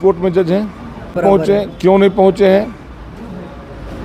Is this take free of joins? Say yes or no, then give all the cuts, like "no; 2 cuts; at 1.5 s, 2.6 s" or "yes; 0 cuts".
no; 1 cut; at 1.2 s